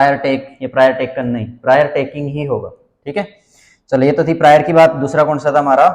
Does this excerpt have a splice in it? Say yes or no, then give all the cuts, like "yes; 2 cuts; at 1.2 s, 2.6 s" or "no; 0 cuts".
no; 0 cuts